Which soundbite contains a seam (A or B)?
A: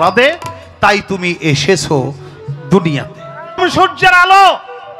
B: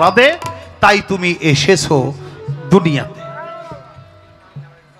A